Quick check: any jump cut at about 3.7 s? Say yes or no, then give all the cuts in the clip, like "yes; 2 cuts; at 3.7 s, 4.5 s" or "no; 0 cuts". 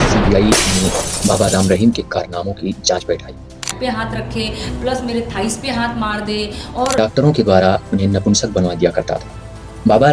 yes; 2 cuts; at 3.7 s, 7.0 s